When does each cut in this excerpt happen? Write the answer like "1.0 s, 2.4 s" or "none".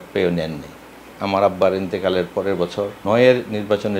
1.1 s, 3.0 s